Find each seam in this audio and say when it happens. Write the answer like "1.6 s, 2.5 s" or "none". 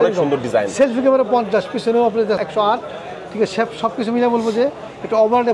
2.4 s